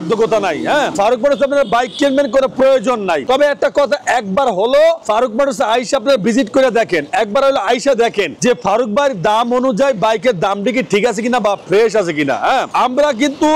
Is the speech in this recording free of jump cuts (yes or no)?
yes